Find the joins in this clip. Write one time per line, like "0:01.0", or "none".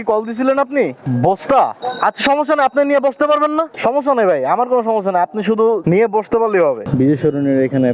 0:01.0
0:01.8
0:03.7
0:06.8